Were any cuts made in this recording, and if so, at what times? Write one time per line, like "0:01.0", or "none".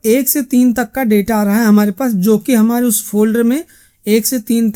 none